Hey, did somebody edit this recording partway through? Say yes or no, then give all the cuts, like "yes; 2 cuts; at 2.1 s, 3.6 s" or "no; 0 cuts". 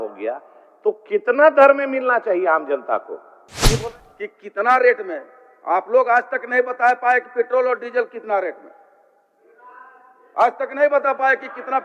yes; 1 cut; at 3.7 s